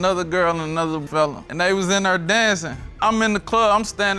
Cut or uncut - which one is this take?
cut